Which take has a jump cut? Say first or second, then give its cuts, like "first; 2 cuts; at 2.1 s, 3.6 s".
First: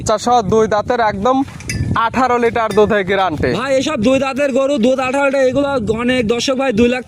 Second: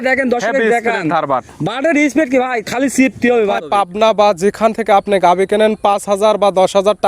second; 1 cut; at 3.6 s